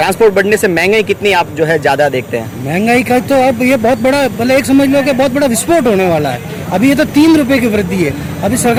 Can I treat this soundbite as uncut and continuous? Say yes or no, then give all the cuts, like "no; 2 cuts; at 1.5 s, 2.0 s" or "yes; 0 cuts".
yes; 0 cuts